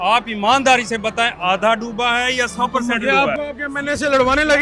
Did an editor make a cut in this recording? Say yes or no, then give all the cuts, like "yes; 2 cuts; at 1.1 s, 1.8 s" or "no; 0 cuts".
no; 0 cuts